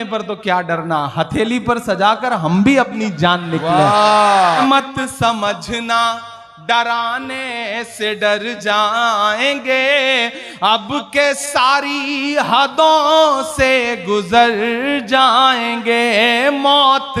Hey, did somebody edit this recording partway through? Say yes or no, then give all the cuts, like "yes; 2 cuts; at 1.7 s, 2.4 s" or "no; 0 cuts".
yes; 1 cut; at 4.6 s